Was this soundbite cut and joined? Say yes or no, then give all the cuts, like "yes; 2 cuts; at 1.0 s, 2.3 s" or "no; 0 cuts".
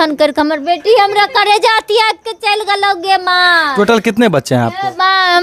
no; 0 cuts